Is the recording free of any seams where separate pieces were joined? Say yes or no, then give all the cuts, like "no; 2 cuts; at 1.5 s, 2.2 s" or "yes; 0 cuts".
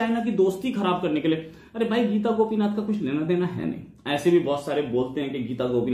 yes; 0 cuts